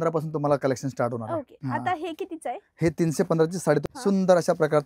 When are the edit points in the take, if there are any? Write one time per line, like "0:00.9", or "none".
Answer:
0:01.5
0:03.8